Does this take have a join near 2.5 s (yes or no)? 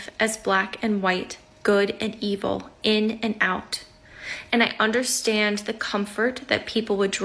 no